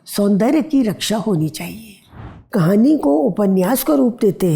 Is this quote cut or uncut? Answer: cut